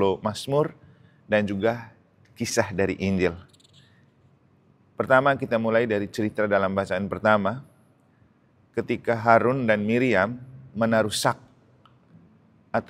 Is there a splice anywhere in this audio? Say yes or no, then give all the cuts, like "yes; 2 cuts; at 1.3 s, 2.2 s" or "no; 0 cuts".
no; 0 cuts